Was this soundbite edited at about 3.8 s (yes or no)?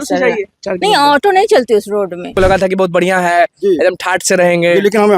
no